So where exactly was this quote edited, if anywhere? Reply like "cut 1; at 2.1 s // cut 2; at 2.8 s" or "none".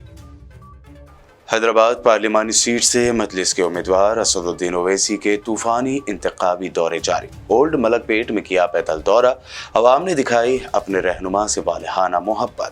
cut 1; at 1.1 s